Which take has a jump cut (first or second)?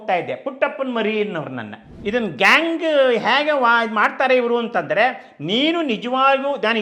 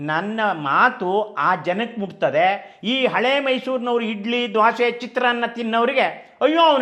first